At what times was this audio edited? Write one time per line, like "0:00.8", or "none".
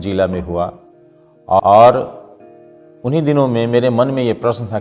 0:01.6